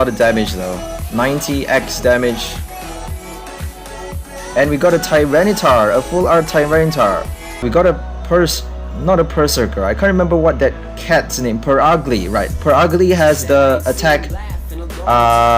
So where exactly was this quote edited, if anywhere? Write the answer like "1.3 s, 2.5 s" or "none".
7.6 s